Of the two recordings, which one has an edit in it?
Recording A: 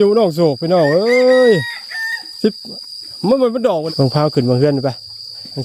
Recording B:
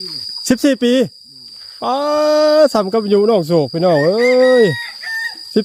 A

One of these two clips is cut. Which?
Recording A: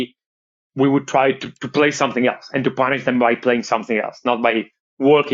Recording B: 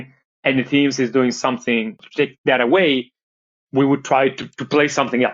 B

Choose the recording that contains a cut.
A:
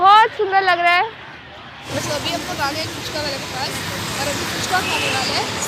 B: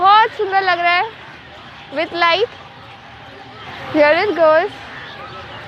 A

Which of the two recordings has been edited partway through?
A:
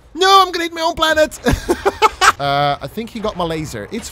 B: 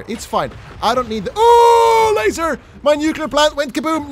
A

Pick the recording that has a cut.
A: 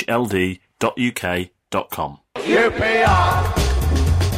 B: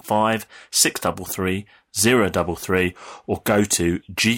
A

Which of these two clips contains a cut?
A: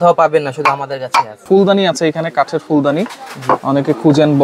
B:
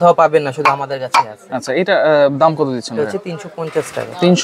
A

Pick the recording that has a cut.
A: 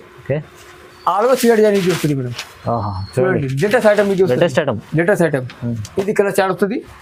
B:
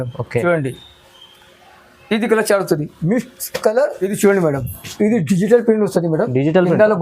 B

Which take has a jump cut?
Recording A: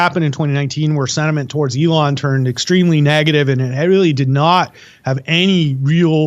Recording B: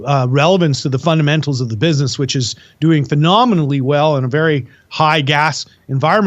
B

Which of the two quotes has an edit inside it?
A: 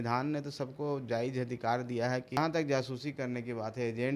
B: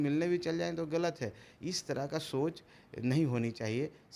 A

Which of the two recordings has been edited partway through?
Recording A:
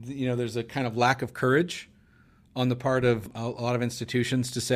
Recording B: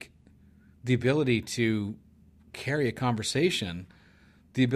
A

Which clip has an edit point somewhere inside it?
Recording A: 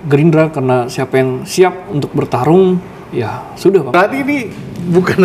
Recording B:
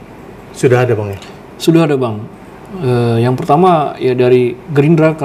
A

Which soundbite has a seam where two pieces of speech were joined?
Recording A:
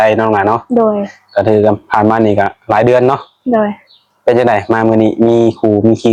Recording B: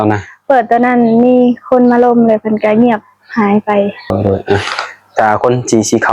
B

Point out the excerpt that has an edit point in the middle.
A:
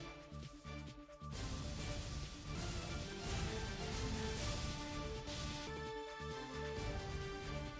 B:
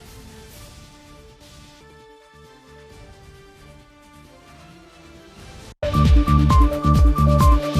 B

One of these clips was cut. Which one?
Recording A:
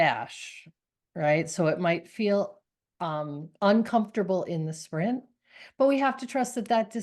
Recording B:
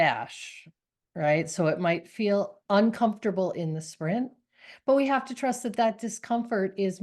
B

